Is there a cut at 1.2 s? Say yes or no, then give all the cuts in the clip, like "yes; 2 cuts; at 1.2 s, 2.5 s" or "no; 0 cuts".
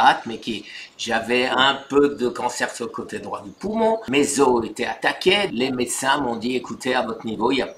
no; 2 cuts; at 4.0 s, 5.5 s